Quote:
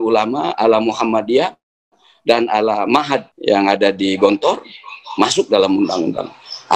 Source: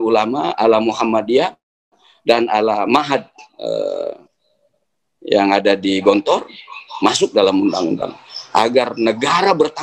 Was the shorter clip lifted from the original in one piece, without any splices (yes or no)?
no